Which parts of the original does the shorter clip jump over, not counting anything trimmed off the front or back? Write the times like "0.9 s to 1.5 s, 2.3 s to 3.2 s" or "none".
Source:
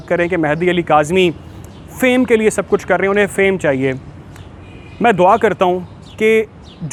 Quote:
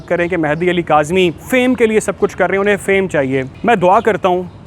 1.4 s to 1.9 s, 4.0 s to 4.9 s